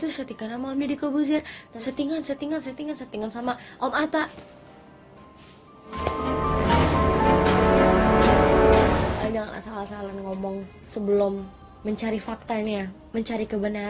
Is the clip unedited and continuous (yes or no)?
no